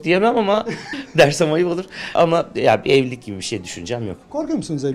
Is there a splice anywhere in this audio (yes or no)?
yes